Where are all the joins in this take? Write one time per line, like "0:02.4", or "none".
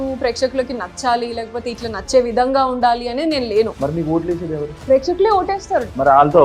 none